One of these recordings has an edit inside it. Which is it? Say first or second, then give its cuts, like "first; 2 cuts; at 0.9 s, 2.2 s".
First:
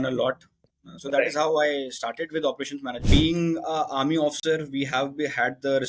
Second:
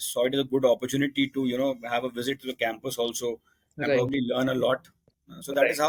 first; 1 cut; at 3.0 s